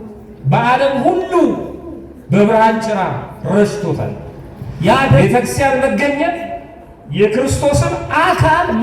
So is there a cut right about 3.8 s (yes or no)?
no